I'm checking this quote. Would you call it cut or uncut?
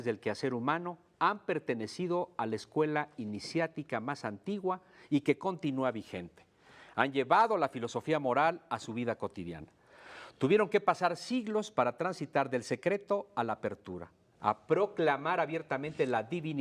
cut